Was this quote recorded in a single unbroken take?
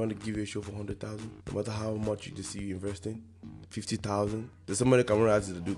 no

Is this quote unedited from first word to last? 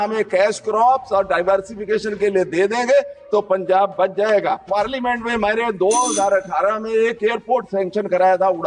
no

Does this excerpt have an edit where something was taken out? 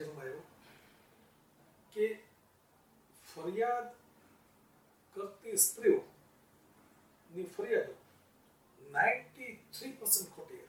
no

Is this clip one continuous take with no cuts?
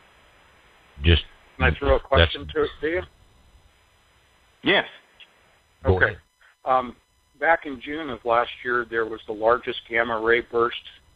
no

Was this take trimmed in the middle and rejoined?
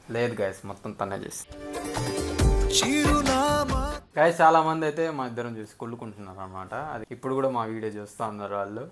yes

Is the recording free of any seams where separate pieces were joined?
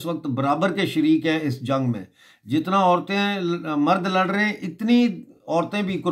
yes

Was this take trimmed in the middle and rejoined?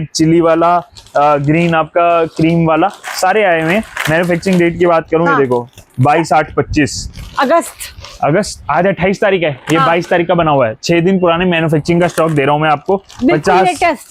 no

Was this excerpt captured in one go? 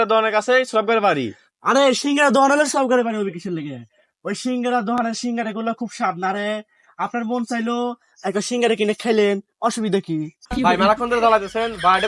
yes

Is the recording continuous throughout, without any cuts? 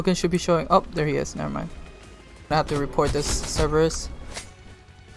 no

